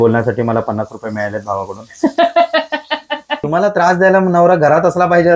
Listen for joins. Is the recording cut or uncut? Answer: cut